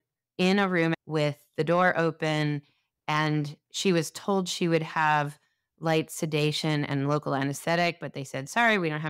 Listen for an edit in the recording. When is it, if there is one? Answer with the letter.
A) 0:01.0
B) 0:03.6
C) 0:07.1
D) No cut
A